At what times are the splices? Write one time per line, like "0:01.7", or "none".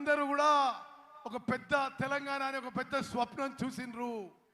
0:03.5